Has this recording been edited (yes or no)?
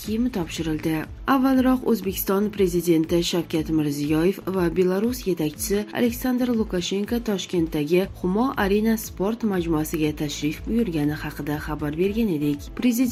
no